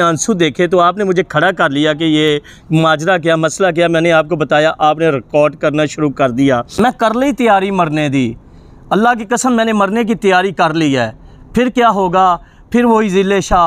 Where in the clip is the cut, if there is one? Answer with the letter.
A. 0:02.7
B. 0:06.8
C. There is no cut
B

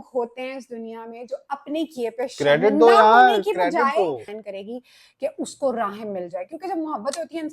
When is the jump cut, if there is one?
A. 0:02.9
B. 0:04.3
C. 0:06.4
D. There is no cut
B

